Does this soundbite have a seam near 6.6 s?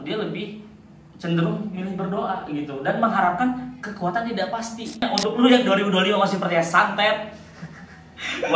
no; 1 cut; at 5.0 s

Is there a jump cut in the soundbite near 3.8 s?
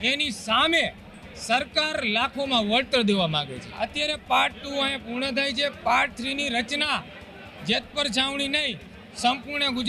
yes; 1 cut; at 3.8 s

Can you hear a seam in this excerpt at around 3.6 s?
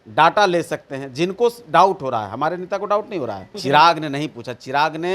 yes; 1 cut; at 3.6 s

